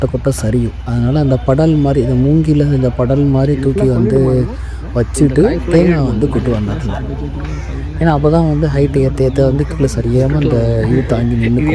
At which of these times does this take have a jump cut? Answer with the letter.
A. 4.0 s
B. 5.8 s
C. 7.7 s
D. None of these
D